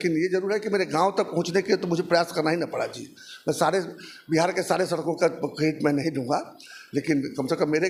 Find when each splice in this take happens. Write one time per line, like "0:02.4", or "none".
none